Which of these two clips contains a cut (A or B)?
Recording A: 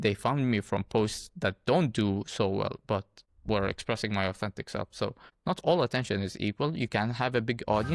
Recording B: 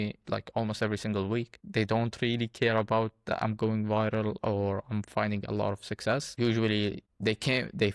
B